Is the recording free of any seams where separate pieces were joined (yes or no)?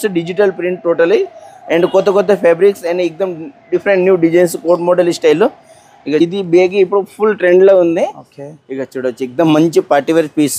no